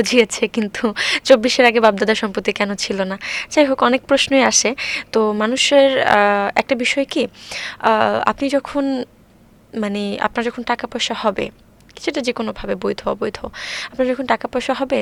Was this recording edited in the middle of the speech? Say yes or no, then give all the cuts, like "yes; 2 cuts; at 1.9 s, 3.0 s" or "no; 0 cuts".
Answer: no; 0 cuts